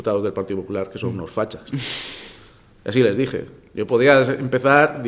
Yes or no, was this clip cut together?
no